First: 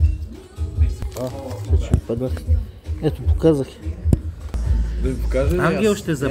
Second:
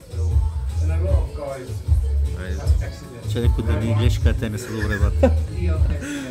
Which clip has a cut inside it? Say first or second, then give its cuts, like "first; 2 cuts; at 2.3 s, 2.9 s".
first; 1 cut; at 1.0 s